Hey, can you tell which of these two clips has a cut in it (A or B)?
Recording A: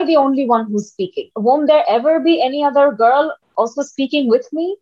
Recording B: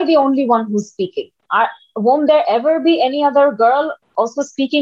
A